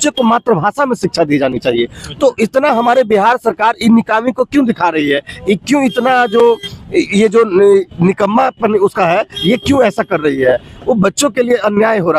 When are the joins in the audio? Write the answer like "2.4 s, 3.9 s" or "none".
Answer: none